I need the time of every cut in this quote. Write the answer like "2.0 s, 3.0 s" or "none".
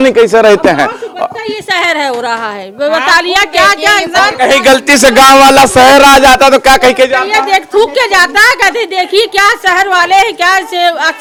none